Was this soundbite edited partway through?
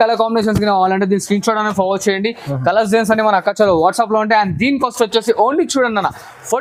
no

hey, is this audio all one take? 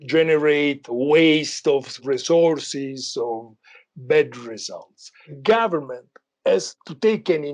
no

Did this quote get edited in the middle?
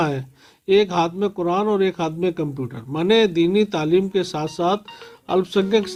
no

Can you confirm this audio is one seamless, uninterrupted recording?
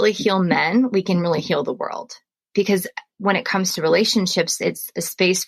no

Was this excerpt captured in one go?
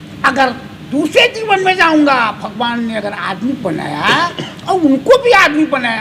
yes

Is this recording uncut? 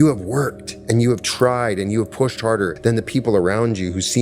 no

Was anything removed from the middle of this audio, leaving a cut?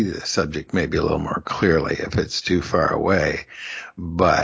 no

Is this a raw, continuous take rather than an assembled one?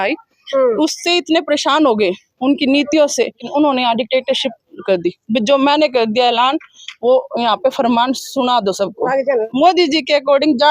no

